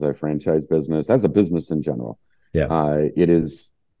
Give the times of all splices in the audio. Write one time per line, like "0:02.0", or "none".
none